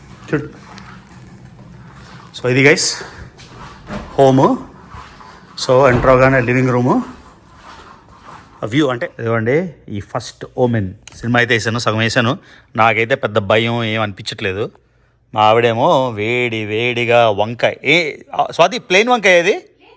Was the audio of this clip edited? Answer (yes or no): yes